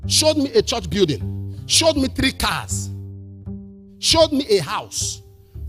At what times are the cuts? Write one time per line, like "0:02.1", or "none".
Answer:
0:02.7
0:04.0